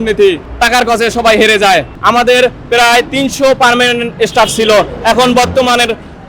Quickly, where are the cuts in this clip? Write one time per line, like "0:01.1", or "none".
0:01.9